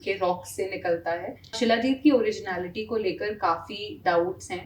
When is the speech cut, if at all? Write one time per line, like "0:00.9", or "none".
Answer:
0:01.6

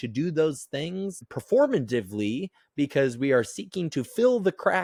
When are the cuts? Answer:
none

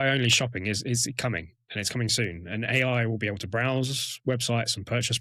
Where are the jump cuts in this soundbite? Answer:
none

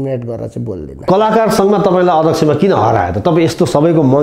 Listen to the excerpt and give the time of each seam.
0:01.1

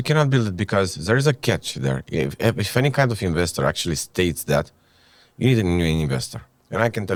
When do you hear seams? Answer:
none

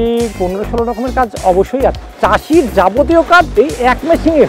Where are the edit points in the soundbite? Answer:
0:02.1
0:03.5

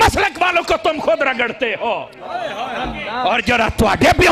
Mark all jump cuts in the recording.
none

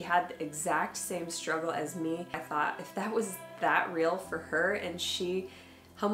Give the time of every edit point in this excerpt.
0:02.4

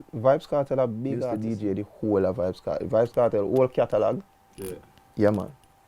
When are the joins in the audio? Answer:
0:01.3

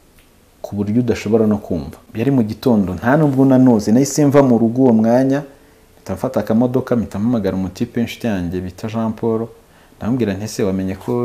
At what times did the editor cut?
0:02.0

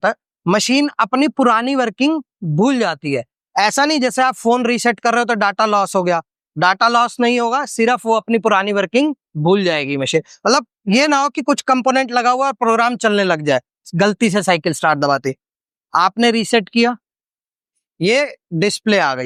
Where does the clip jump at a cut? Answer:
none

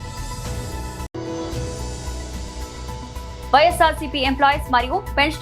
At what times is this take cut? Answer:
0:01.1
0:03.0

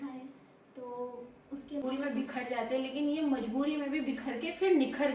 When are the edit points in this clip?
0:01.8

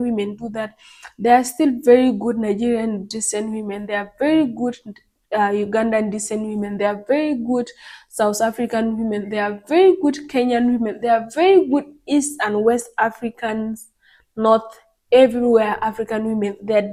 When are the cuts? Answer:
none

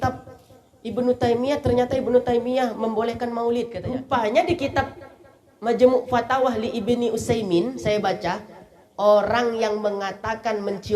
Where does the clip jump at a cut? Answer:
0:03.8

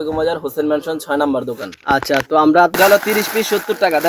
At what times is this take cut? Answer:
0:02.8

